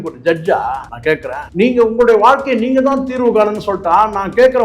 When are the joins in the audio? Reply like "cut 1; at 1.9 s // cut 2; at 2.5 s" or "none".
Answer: cut 1; at 1.3 s